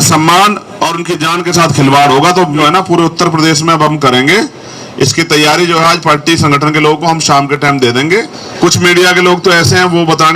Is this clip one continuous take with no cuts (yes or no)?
no